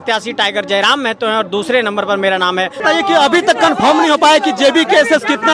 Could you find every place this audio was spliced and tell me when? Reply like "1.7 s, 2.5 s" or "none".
2.8 s